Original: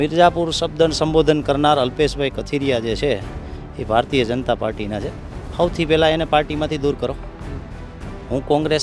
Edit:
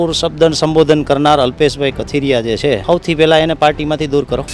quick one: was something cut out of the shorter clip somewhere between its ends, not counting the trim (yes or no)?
yes